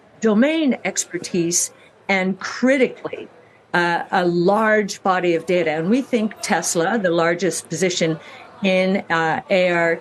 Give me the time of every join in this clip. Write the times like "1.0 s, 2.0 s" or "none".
none